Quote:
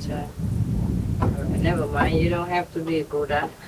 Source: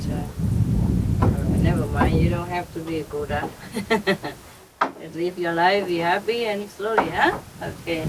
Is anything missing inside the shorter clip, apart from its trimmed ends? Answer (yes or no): no